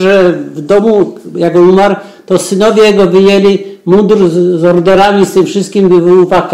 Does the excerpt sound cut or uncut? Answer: uncut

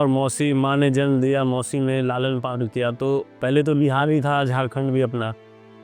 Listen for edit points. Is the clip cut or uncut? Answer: uncut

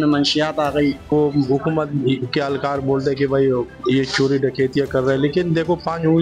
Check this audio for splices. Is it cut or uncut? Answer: cut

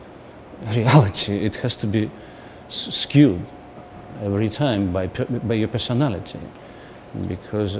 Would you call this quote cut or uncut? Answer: cut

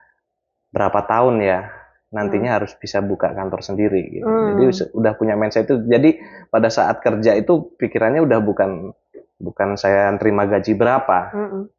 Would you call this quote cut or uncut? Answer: uncut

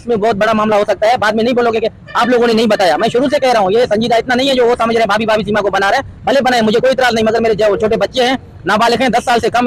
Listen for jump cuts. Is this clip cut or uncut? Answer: uncut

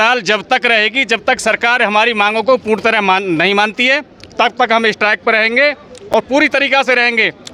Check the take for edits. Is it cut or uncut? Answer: uncut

